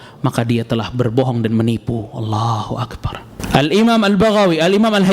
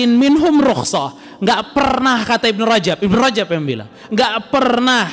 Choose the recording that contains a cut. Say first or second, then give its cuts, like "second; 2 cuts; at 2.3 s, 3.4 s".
first; 1 cut; at 3.4 s